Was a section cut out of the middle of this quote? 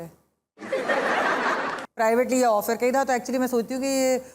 yes; 1 cut; at 1.8 s

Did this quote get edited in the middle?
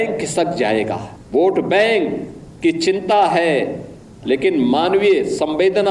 yes; 1 cut; at 1.1 s

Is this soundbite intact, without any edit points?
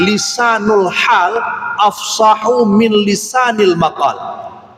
yes; 0 cuts

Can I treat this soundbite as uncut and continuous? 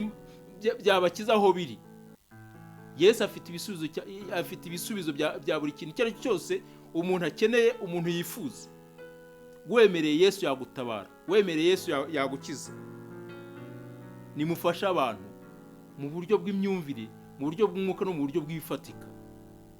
yes; 0 cuts

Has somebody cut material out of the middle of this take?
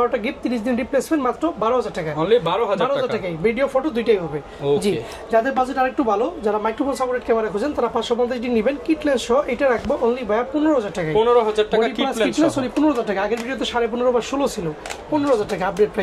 no; 0 cuts

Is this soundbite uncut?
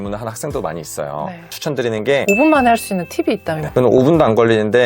no; 2 cuts; at 2.2 s, 3.6 s

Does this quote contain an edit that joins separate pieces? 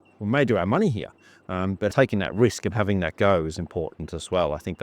yes; 1 cut; at 1.9 s

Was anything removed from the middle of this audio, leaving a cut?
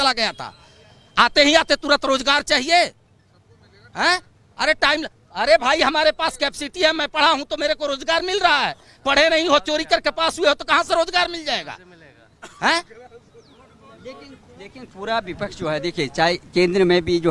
no; 0 cuts

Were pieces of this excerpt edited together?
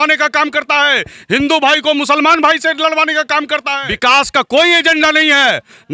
yes; 1 cut; at 3.7 s

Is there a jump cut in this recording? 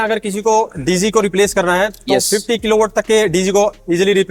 no; 0 cuts

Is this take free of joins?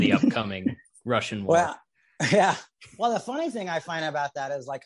yes; 0 cuts

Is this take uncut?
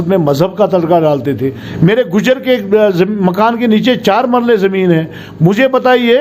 no; 1 cut; at 1.6 s

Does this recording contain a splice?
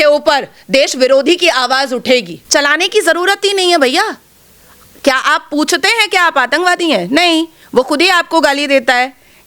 yes; 1 cut; at 2.4 s

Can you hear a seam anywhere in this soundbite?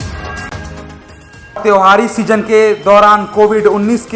no; 0 cuts

